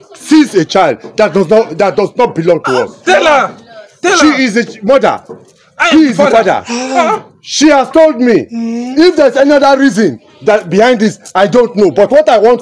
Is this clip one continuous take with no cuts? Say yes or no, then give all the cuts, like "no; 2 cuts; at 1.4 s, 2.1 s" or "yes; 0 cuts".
yes; 0 cuts